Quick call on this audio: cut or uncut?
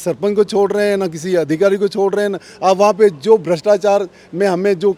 uncut